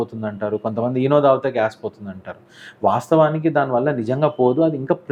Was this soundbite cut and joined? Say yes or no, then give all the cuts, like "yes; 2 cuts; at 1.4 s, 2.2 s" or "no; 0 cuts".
no; 0 cuts